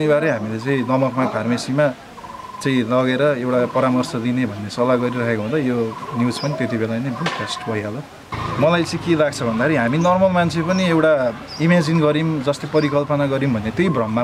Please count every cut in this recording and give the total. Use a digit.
1